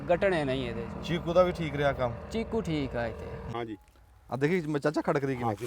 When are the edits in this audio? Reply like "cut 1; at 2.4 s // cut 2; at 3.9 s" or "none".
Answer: cut 1; at 3.4 s